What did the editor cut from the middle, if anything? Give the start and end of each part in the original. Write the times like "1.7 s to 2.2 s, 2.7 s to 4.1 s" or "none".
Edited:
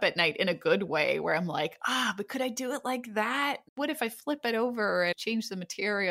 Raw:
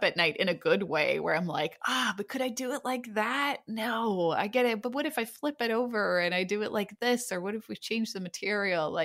3.7 s to 4.9 s, 6.3 s to 7.8 s